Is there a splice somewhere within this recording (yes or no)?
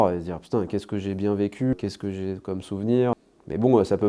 yes